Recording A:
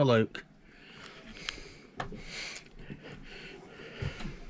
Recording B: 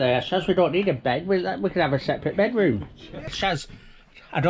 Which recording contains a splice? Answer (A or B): B